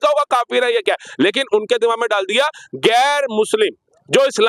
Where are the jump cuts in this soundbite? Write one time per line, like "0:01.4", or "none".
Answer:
none